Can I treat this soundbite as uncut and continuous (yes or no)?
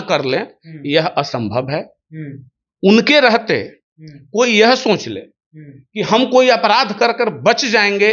yes